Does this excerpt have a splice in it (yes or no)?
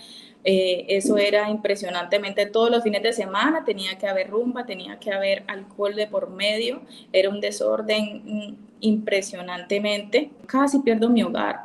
yes